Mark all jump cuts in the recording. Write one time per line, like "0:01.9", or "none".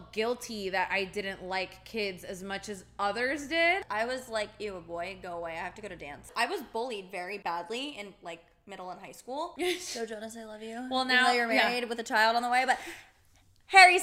0:03.8
0:06.3
0:07.4
0:09.5